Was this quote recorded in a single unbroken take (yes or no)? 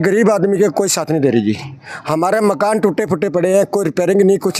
yes